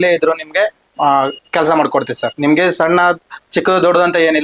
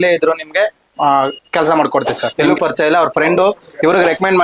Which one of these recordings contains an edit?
second; 1 cut; at 2.3 s

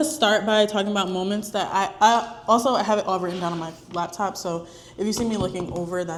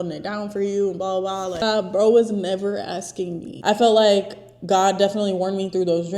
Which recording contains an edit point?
second; 2 cuts; at 1.6 s, 3.5 s

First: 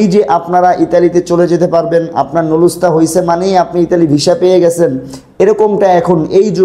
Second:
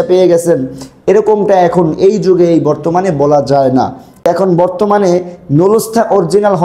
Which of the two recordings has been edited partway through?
second; 1 cut; at 4.1 s

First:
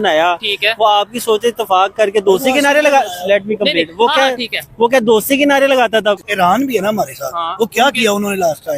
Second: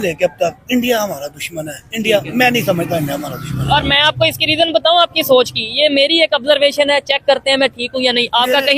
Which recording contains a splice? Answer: first; 1 cut; at 6.3 s

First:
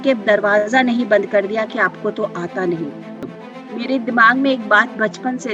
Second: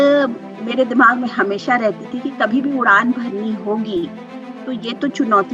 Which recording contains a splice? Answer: first; 1 cut; at 3.3 s

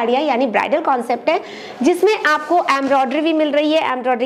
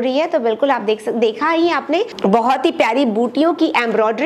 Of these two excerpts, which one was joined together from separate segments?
second; 1 cut; at 2.1 s

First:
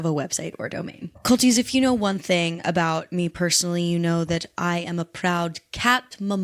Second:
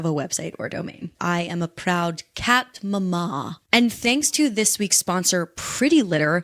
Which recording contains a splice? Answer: second; 2 cuts; at 1.1 s, 3.6 s

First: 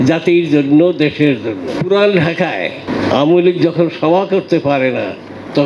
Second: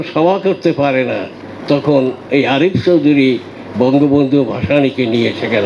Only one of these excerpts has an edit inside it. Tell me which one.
first; 2 cuts; at 1.8 s, 2.8 s

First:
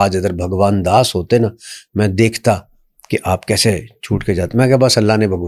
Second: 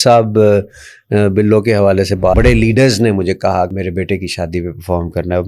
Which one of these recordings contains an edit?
second; 2 cuts; at 2.3 s, 3.7 s

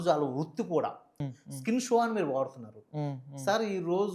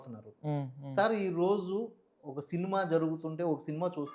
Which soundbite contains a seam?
first; 1 cut; at 1.1 s

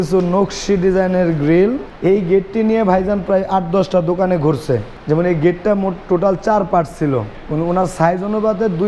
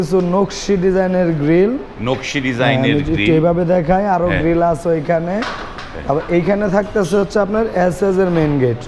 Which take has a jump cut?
first; 3 cuts; at 1.9 s, 4.9 s, 7.4 s

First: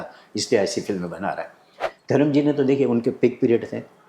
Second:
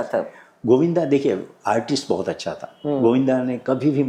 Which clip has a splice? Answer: first; 1 cut; at 1.8 s

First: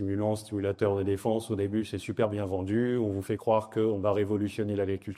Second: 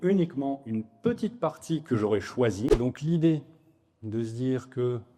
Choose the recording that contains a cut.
second; 1 cut; at 2.7 s

